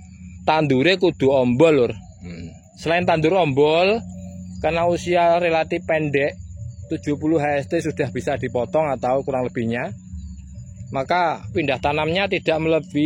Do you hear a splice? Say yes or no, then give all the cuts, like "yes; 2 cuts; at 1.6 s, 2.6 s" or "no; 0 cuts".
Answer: yes; 1 cut; at 11.5 s